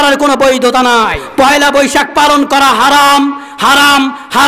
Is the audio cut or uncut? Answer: cut